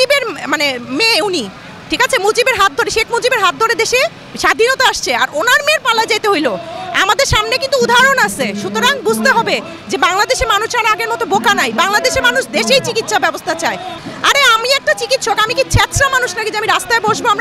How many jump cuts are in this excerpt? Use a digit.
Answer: 1